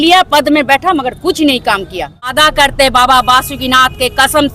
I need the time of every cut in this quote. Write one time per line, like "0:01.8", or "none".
0:02.3